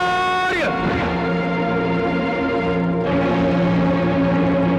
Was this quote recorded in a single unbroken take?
yes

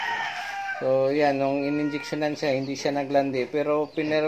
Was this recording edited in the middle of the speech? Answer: no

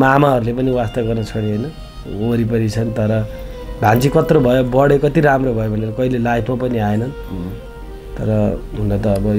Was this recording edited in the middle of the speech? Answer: no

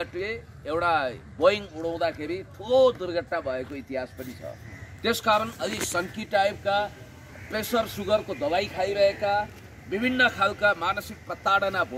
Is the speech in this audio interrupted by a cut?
no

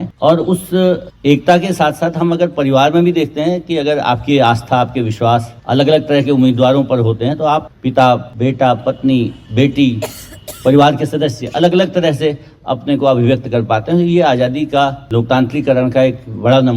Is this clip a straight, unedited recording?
no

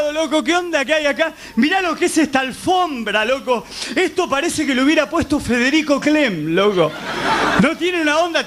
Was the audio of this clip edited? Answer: yes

